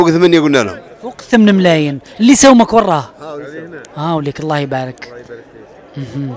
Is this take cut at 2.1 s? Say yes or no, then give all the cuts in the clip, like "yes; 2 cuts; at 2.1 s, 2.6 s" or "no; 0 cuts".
no; 0 cuts